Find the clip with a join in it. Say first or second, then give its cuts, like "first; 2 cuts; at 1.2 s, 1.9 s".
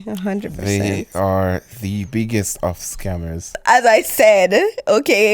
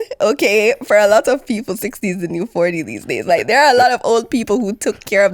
first; 1 cut; at 3.5 s